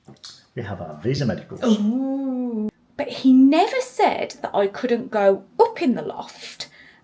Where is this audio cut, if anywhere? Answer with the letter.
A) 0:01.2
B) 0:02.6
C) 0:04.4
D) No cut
B